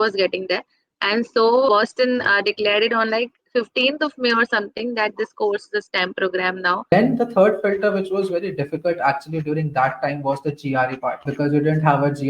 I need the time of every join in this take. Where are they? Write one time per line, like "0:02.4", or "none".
0:01.7
0:06.9
0:11.3